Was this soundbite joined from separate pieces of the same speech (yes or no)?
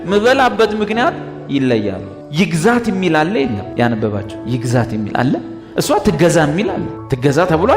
yes